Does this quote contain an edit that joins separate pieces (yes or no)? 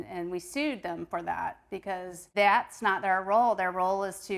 no